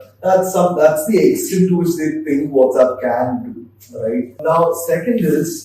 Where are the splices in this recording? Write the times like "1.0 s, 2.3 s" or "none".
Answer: 4.4 s